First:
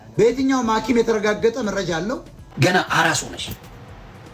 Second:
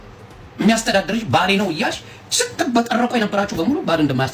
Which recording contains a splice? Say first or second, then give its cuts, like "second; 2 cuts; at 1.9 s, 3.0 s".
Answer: first; 1 cut; at 2.5 s